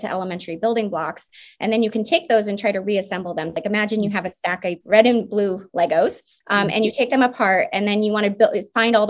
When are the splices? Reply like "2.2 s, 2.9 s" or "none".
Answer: 3.5 s, 4.8 s, 6.3 s